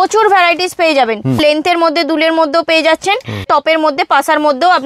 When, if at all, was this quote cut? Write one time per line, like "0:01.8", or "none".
0:01.4
0:03.4